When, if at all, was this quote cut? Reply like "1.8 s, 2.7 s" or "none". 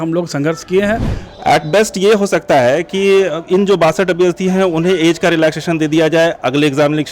1.2 s